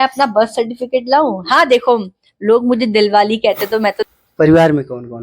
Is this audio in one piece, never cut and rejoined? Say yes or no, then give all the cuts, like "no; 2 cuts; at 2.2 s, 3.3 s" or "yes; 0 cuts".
no; 1 cut; at 4.0 s